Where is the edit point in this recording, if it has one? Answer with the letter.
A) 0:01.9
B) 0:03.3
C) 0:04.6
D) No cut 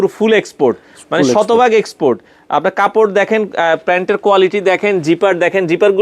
D